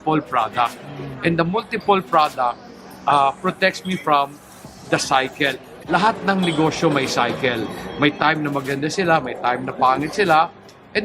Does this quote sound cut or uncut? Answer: uncut